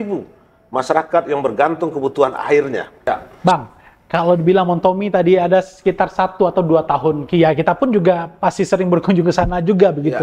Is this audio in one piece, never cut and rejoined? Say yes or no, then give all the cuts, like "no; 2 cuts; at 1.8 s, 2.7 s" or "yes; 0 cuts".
no; 1 cut; at 3.2 s